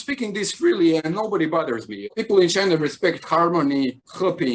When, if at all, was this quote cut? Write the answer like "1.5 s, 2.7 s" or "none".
none